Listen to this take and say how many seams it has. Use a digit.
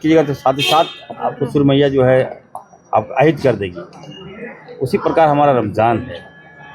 0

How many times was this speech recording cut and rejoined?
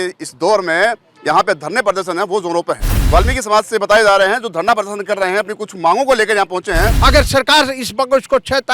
2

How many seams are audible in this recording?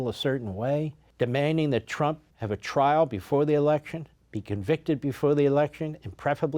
2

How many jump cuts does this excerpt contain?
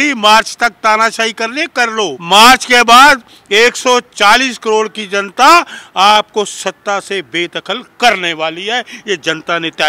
1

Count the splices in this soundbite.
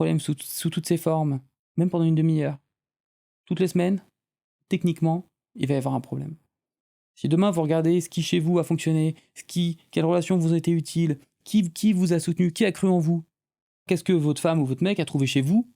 3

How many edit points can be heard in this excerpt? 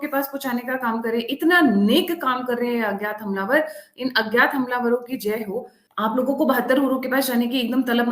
1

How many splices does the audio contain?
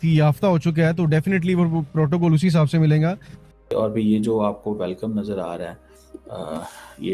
1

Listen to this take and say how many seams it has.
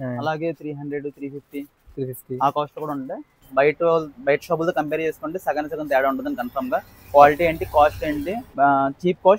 2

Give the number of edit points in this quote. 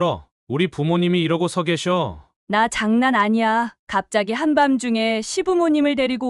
0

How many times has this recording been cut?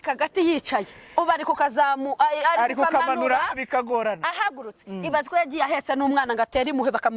0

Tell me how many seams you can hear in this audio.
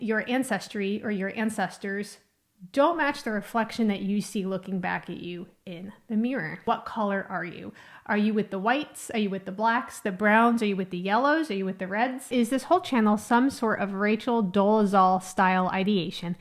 2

